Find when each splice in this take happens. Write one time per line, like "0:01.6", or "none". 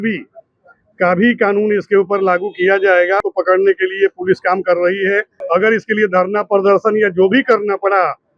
0:03.2
0:05.3